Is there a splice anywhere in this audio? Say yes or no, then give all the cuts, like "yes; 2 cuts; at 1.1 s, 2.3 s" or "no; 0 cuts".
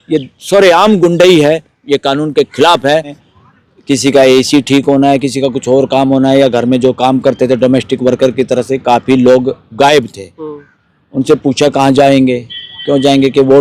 yes; 1 cut; at 3.2 s